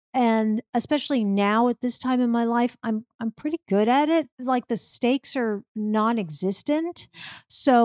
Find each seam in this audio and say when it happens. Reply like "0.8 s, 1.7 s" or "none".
4.4 s